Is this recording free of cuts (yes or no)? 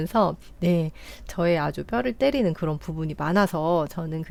yes